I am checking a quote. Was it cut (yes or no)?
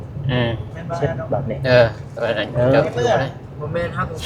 no